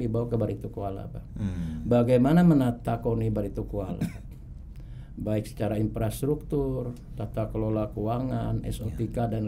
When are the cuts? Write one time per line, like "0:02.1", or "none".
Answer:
none